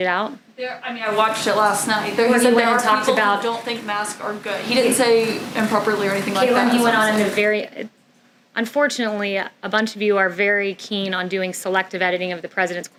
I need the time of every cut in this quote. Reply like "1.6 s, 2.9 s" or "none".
none